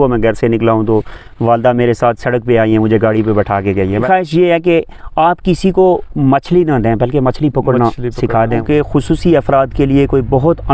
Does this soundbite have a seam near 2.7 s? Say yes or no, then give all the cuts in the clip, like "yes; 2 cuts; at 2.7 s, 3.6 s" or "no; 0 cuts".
no; 2 cuts; at 4.0 s, 8.5 s